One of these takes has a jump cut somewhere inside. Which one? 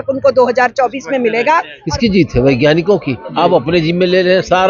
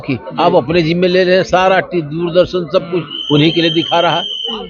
first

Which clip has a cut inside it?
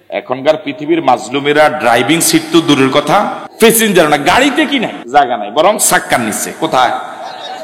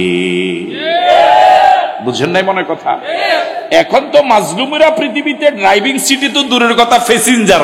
first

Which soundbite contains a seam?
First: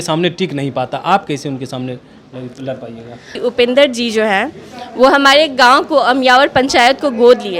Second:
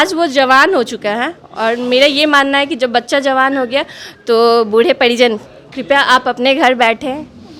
first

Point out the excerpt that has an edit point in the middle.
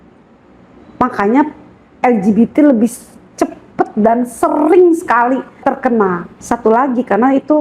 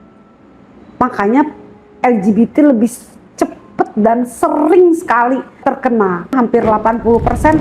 second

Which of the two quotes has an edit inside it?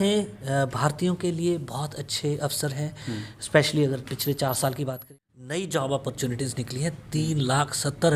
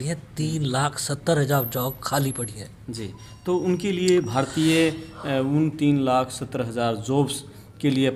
first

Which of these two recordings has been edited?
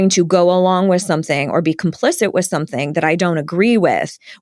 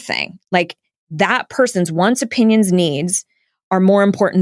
second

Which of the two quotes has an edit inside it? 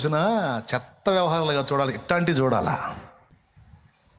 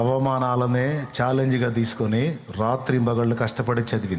first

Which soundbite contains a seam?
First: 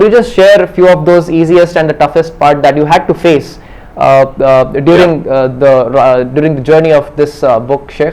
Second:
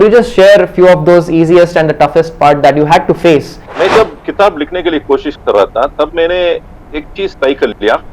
second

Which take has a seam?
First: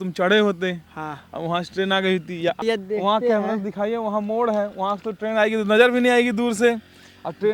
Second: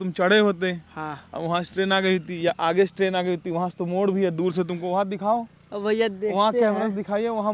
first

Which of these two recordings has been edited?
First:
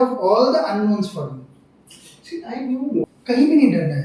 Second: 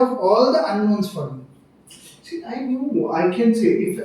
first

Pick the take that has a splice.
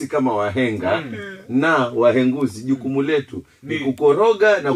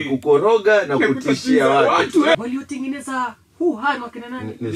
second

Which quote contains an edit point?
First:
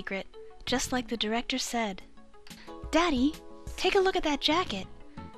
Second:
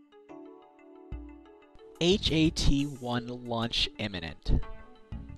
first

